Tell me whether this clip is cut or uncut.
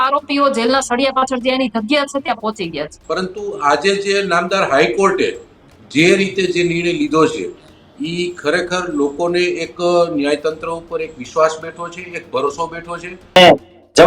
cut